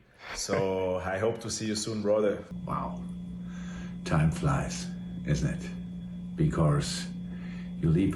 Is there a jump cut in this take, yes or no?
yes